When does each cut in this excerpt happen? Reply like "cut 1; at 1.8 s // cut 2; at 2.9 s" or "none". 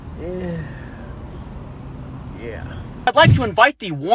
cut 1; at 3.1 s